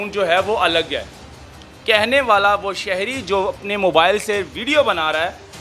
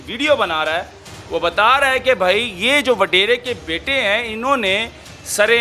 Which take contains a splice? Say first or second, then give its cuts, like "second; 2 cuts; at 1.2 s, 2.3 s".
first; 1 cut; at 1.6 s